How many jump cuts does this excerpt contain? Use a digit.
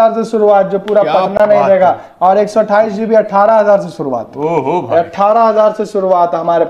0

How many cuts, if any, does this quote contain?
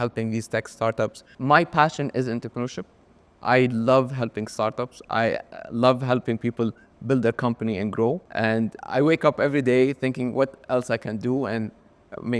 2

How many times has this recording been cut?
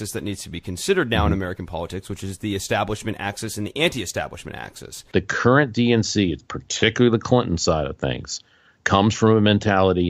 1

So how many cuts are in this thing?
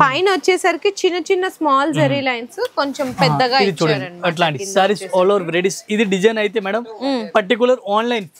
0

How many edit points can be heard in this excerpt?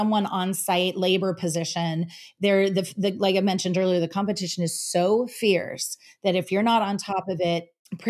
0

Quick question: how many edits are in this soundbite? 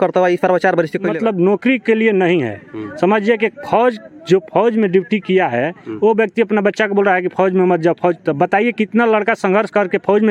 1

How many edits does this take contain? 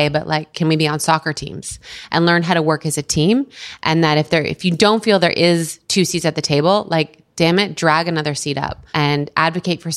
1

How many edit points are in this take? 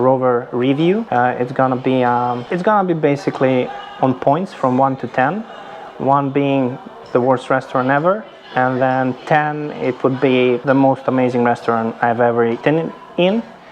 4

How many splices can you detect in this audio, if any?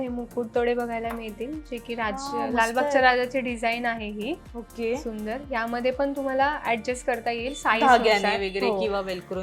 0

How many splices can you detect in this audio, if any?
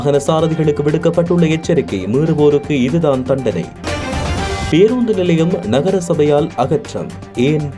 0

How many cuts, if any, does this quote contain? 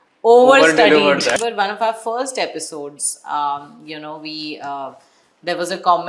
1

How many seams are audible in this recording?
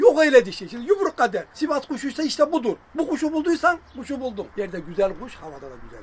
2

